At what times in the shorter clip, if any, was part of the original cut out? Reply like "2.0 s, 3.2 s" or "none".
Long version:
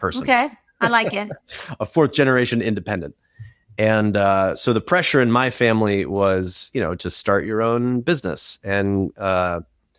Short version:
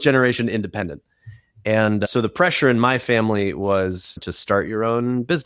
2.1 s, 4.2 s